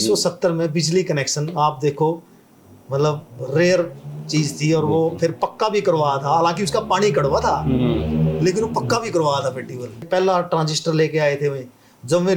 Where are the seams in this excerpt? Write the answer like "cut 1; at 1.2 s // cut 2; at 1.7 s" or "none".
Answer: cut 1; at 10.1 s

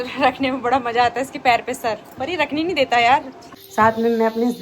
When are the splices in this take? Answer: cut 1; at 3.4 s

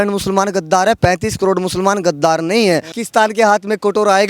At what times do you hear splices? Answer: cut 1; at 1.0 s // cut 2; at 2.9 s

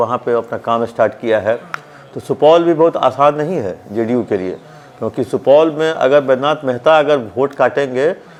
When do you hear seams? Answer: none

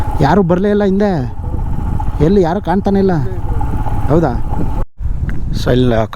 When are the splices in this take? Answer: cut 1; at 4.8 s

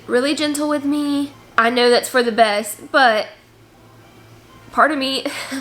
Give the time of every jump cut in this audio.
none

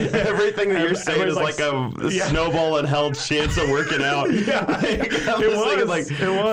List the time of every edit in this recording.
none

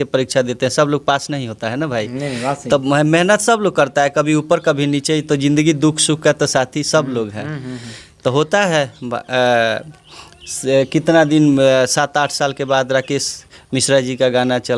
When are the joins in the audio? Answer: none

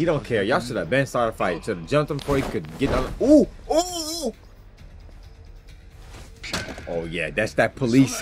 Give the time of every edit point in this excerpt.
none

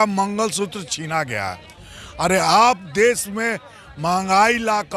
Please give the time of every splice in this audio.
none

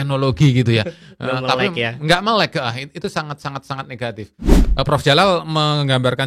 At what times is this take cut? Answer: cut 1; at 4.6 s

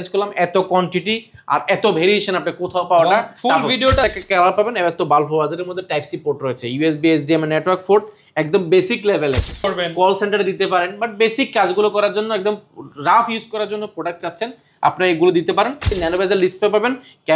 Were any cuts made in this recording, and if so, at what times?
cut 1; at 4.0 s // cut 2; at 9.7 s // cut 3; at 15.9 s

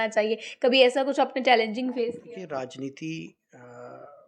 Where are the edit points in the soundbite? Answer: cut 1; at 2.2 s

